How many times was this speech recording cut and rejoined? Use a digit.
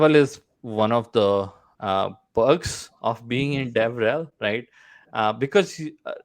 0